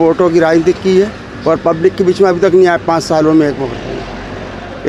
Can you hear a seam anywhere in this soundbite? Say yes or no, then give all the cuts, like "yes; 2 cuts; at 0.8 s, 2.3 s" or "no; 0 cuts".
no; 0 cuts